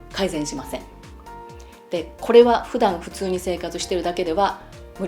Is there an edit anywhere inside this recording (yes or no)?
no